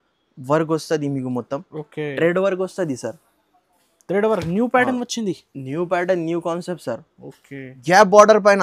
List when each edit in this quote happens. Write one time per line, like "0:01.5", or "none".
0:07.7